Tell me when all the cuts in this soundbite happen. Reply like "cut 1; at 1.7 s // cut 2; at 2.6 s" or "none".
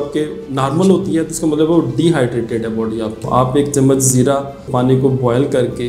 cut 1; at 3.2 s // cut 2; at 4.6 s